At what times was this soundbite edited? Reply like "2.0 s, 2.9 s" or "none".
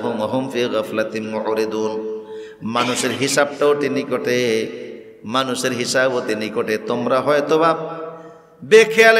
none